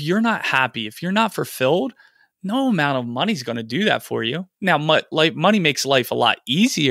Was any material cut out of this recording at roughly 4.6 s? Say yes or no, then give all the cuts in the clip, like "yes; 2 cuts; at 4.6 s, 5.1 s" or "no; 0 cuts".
no; 0 cuts